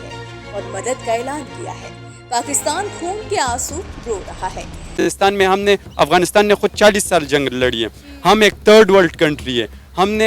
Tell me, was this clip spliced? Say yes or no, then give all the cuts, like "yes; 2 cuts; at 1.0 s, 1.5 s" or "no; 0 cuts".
yes; 1 cut; at 5.0 s